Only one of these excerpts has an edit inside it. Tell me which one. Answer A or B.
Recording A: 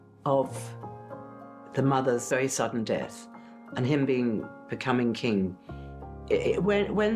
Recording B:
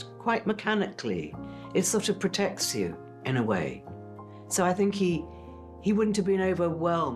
A